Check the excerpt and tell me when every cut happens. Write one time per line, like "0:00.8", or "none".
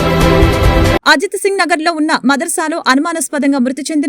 0:00.9